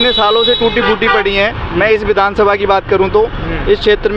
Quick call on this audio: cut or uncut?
uncut